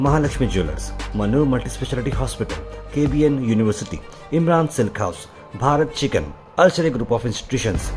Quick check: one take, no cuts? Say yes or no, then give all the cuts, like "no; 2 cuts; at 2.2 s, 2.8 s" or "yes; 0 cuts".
yes; 0 cuts